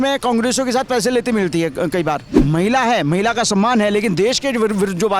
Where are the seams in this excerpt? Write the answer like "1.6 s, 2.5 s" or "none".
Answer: 2.3 s